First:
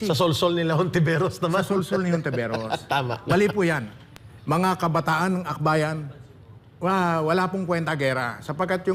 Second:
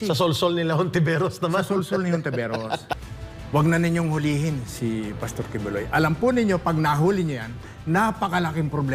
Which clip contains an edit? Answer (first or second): second